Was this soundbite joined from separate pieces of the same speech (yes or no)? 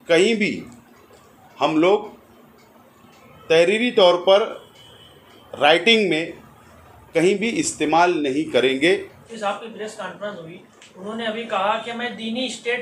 yes